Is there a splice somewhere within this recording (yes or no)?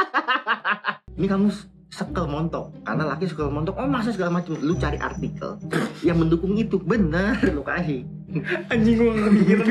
yes